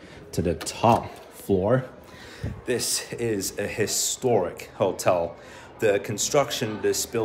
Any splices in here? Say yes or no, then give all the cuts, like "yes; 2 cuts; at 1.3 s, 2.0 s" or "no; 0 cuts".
no; 0 cuts